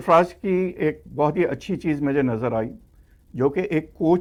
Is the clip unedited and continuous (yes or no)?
yes